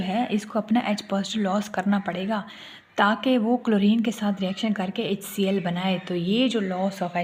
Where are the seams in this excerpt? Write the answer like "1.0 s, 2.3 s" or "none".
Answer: none